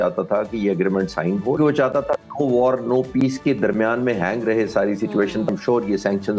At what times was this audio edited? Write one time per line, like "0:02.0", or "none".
0:01.6
0:05.5